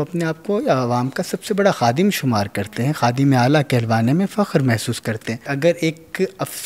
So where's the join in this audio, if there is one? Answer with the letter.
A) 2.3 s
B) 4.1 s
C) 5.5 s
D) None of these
C